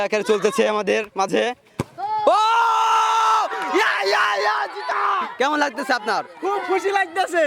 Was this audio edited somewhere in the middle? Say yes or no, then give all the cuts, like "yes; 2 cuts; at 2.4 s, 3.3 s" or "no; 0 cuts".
yes; 1 cut; at 5.3 s